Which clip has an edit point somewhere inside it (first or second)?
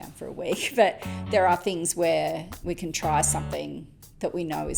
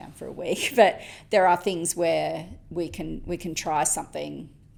first